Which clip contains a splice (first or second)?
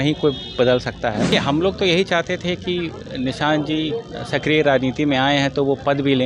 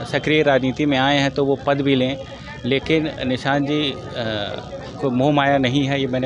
first